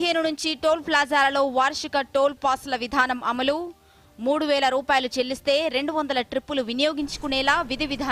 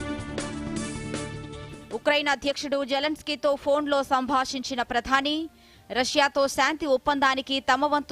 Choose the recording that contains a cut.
second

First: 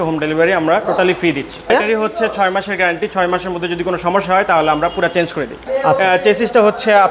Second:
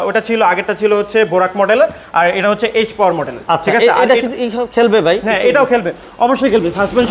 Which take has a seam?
first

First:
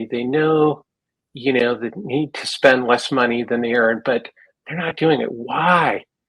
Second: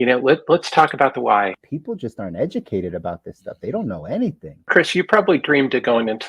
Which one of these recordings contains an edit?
second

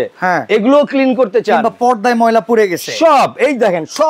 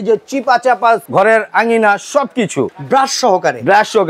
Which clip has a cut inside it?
second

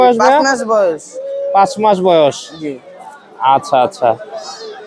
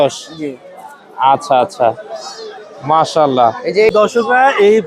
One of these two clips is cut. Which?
second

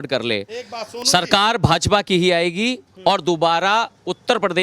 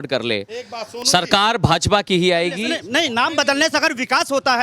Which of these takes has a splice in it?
second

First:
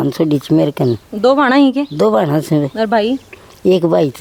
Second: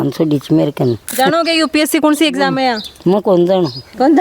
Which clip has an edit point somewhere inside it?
second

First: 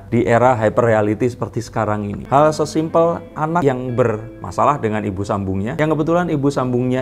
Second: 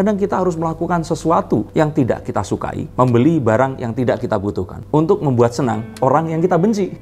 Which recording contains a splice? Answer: first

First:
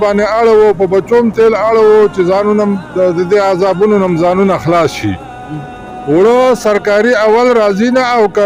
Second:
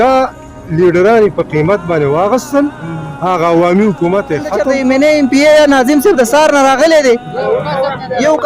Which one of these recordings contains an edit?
second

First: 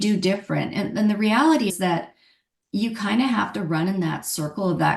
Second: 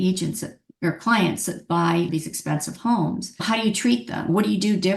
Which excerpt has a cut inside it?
second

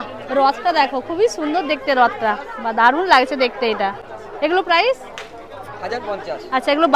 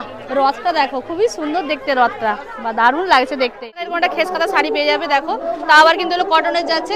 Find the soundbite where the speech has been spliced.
second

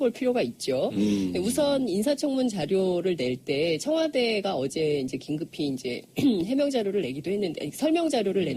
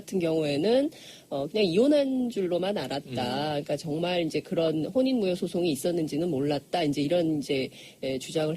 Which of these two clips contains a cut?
second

